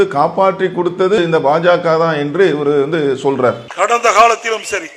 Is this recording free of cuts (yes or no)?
no